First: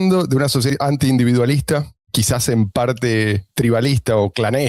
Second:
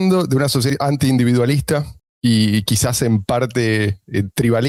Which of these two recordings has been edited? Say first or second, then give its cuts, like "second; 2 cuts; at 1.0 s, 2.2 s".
first; 2 cuts; at 2.1 s, 3.5 s